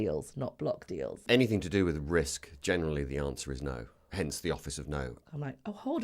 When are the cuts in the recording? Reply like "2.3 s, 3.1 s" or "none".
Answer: 1.2 s, 5.2 s